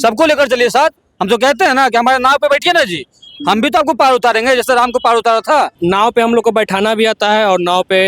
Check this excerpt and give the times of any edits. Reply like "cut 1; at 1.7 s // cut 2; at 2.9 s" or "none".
cut 1; at 5.7 s